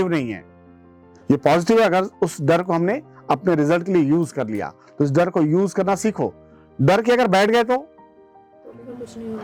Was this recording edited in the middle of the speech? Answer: no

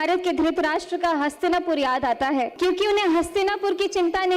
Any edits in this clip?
yes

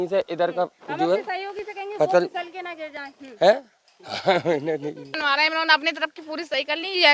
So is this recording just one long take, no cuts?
no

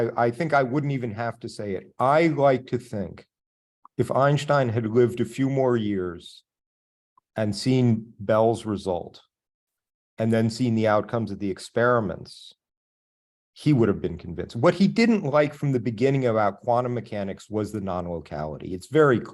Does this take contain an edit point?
no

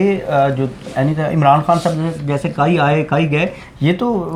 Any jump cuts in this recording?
no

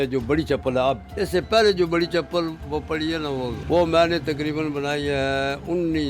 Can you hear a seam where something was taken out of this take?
yes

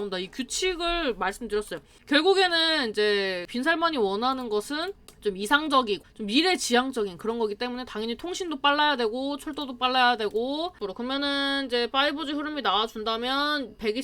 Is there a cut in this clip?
yes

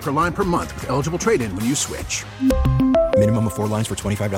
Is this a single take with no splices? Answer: yes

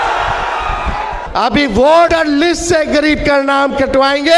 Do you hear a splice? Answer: yes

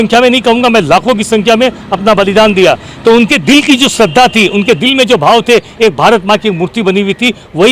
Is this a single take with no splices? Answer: yes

